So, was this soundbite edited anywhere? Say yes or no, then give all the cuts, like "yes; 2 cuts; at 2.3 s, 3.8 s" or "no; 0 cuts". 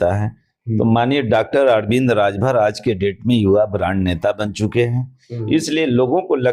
no; 0 cuts